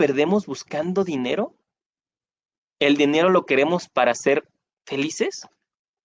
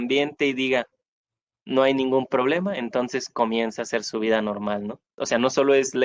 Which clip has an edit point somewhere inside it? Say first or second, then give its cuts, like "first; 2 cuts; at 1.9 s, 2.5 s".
second; 1 cut; at 5.1 s